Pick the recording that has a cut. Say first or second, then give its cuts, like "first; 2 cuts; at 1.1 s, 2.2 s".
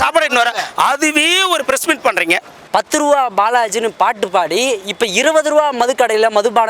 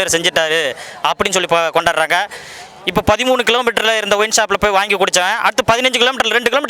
first; 1 cut; at 2.5 s